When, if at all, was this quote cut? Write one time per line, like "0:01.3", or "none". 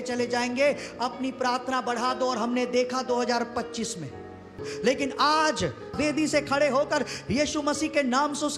0:06.0